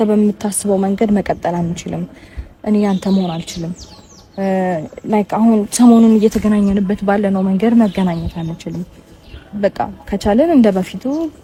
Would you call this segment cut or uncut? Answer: uncut